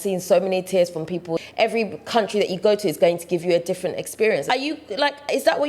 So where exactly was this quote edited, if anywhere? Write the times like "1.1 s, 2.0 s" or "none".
1.4 s, 4.4 s